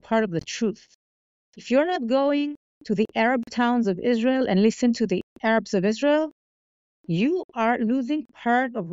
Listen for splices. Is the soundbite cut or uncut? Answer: uncut